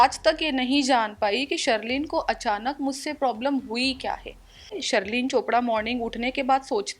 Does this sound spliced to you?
yes; 1 cut; at 4.8 s

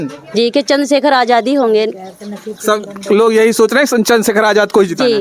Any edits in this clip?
no; 0 cuts

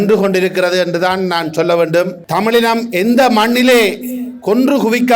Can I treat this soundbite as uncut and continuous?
no; 1 cut; at 2.2 s

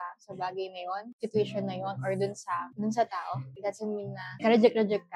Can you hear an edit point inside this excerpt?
yes; 3 cuts; at 1.1 s, 2.7 s, 3.8 s

